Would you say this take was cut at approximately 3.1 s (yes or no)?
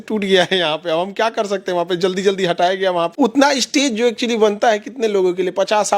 yes